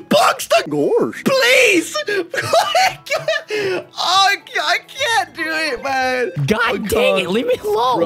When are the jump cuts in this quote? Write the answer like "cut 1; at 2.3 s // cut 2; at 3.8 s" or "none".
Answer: cut 1; at 0.8 s // cut 2; at 6.4 s

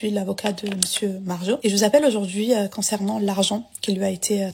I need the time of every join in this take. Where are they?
cut 1; at 1.6 s

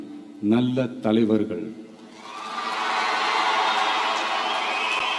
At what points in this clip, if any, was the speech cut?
none

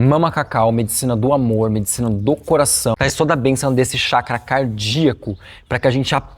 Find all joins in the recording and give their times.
cut 1; at 3.0 s

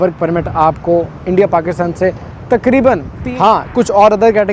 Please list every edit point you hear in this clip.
cut 1; at 3.2 s

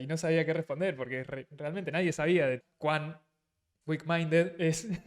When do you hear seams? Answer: cut 1; at 2.6 s

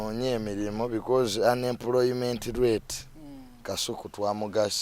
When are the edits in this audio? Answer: none

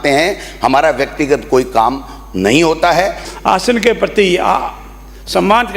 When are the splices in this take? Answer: cut 1; at 3.3 s

